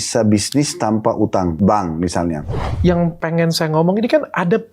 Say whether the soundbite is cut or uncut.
cut